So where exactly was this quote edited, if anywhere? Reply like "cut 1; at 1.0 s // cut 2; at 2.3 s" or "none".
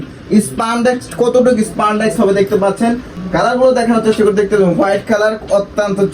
cut 1; at 3.4 s